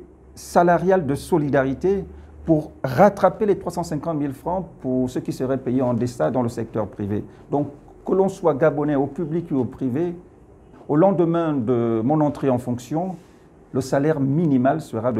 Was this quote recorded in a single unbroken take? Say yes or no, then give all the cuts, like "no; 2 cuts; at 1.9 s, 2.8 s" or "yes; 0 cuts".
no; 1 cut; at 10.7 s